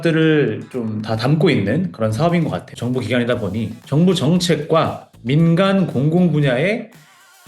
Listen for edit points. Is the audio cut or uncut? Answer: cut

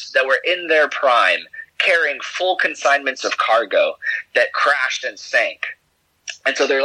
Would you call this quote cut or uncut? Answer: uncut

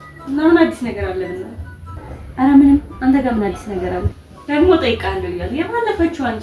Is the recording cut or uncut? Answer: uncut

